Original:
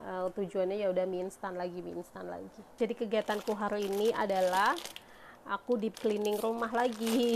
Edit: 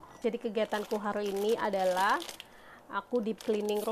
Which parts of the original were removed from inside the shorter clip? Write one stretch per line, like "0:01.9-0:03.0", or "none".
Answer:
none

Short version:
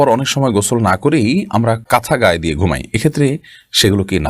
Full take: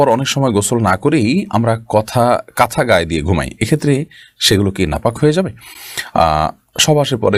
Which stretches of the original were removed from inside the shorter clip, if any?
0:01.8-0:02.5

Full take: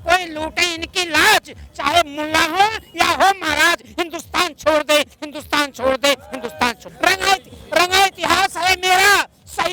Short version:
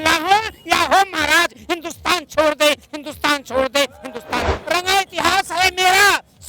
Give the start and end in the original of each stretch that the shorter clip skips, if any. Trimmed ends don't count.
0:06.8-0:07.6

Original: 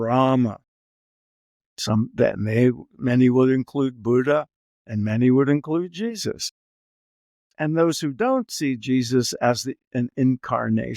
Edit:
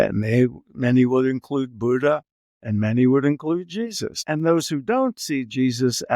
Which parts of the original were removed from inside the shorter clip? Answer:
0:06.3-0:07.4

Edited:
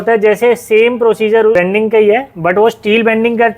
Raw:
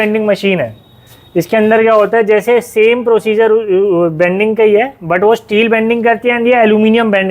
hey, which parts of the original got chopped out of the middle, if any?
0:03.6-0:04.2

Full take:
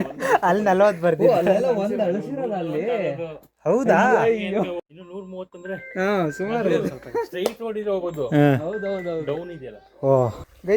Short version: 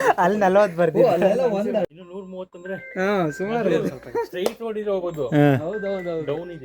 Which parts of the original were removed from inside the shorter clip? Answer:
0:02.1-0:04.9

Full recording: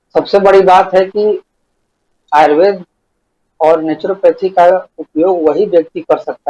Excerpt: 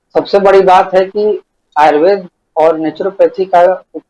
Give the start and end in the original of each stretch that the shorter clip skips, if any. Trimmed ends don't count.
0:01.6-0:02.1
0:02.9-0:03.4

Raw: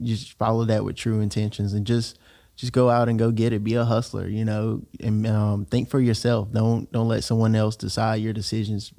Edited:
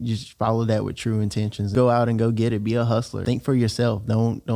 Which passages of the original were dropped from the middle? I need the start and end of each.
0:01.7-0:02.7
0:04.2-0:05.6

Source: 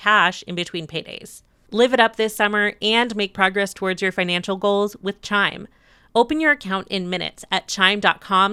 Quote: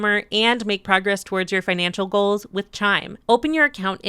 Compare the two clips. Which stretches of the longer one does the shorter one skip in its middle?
0:05.6-0:06.0

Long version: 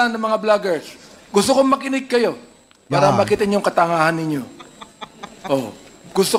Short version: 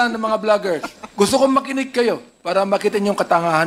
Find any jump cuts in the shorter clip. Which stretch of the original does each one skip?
0:01.0-0:01.1
0:02.5-0:02.8

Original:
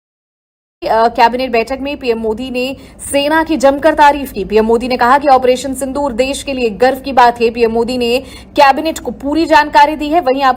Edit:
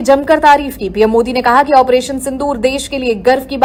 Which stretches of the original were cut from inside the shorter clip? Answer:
none

